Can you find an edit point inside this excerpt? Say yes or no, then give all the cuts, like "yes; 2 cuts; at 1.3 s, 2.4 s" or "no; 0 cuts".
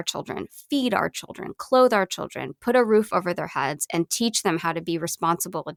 no; 0 cuts